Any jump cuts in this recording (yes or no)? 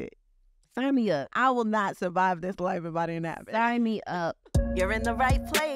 yes